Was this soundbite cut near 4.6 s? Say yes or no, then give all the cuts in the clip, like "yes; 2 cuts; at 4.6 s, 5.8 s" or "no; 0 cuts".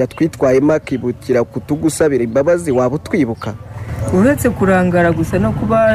no; 1 cut; at 2.3 s